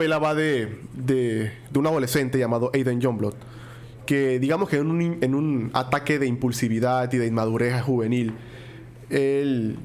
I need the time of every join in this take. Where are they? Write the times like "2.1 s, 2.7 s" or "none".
none